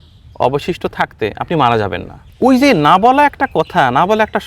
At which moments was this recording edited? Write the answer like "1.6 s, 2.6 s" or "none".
2.2 s